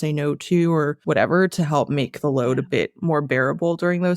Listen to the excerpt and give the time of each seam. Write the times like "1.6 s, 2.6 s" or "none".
1.0 s